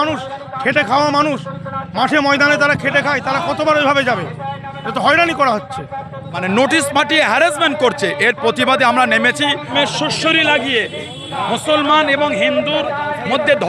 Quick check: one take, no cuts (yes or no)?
no